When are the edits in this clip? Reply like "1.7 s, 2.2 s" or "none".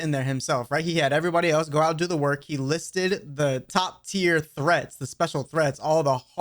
3.7 s